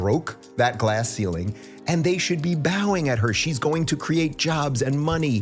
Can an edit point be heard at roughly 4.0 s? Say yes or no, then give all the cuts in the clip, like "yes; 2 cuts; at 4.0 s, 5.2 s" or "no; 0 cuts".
no; 0 cuts